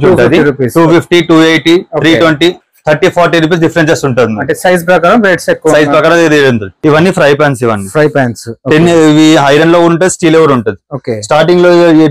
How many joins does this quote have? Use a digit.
1